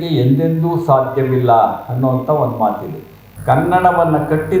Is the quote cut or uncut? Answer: cut